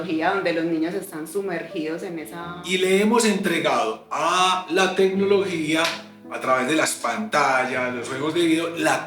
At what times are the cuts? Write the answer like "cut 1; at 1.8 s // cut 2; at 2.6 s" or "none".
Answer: cut 1; at 2.5 s